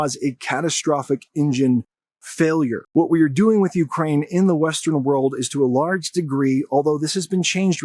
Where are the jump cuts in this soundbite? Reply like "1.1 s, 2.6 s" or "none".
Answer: 2.8 s